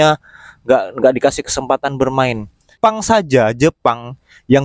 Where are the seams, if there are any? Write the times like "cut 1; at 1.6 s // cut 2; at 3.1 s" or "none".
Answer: cut 1; at 2.8 s